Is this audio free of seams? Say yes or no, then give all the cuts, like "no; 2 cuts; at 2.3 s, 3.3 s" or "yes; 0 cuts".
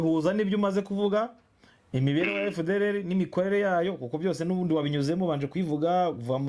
yes; 0 cuts